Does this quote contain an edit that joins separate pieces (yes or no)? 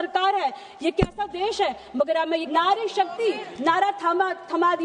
yes